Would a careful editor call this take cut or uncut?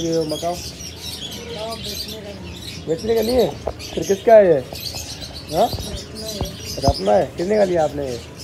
uncut